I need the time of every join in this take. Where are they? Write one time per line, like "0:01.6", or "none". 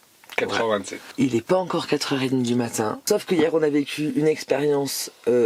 0:01.0
0:03.0